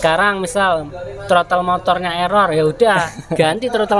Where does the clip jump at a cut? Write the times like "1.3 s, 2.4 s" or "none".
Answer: none

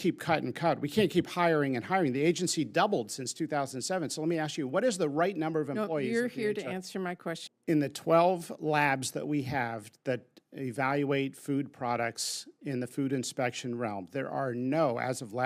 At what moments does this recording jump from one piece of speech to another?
7.5 s

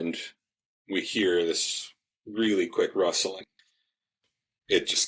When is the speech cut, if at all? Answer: none

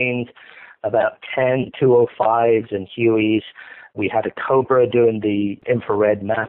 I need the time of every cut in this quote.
4.0 s, 5.6 s

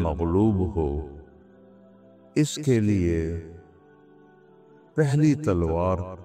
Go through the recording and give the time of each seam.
none

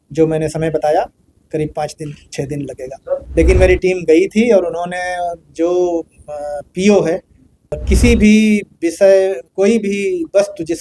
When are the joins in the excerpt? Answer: 3.3 s, 7.8 s

